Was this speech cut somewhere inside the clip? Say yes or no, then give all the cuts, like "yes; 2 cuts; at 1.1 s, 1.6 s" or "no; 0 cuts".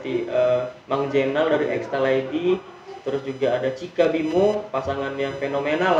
no; 0 cuts